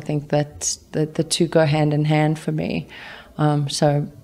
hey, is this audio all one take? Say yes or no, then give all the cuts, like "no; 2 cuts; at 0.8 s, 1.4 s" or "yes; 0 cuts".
yes; 0 cuts